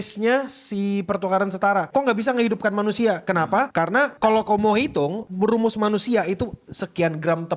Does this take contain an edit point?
yes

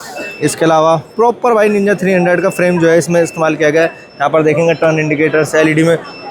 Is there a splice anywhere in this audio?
no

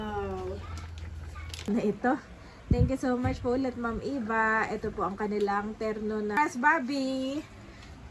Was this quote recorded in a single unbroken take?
no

